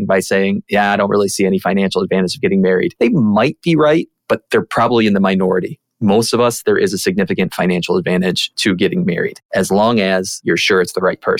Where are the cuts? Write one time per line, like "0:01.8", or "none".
0:02.9
0:08.5
0:09.4
0:10.3